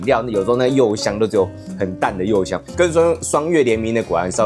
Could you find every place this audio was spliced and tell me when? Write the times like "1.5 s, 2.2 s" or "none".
2.6 s